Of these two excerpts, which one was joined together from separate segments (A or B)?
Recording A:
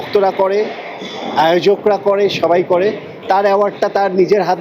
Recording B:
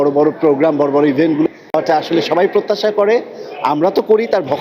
B